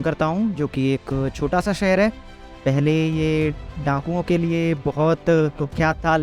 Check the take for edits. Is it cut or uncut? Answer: uncut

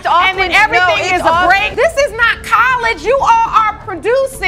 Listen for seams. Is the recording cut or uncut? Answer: cut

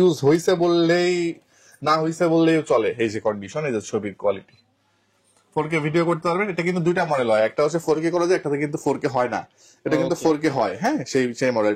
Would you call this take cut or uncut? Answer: uncut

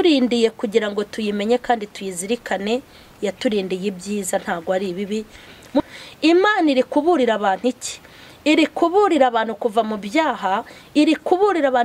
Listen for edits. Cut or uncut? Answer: cut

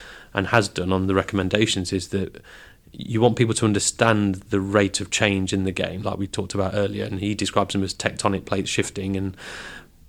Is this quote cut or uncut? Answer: uncut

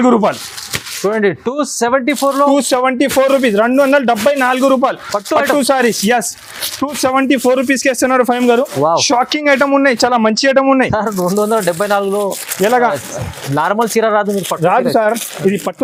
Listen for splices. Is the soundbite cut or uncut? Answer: uncut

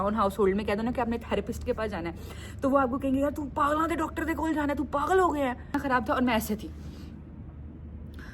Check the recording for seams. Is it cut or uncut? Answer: cut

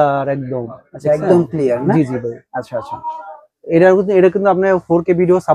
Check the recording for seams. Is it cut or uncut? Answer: uncut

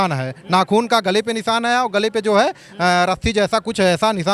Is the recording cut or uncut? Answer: uncut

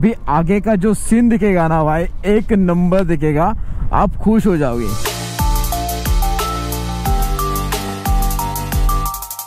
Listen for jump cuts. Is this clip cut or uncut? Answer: uncut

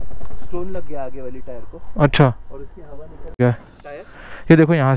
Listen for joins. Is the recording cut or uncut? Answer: cut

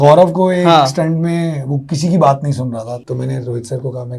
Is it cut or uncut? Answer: cut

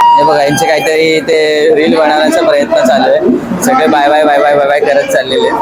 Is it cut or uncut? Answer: uncut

